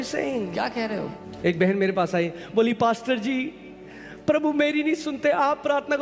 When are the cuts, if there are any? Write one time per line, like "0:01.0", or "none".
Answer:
0:01.2